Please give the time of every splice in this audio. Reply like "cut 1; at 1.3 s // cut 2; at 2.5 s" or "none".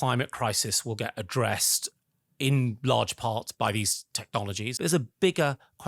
cut 1; at 3.5 s // cut 2; at 4.7 s